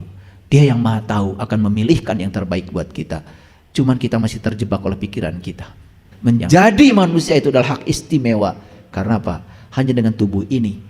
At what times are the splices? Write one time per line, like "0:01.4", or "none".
0:06.1